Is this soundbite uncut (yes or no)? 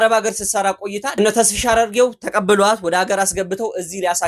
no